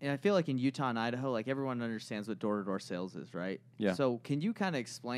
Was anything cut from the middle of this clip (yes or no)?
no